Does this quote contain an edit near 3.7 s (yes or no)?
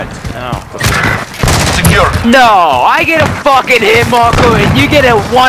no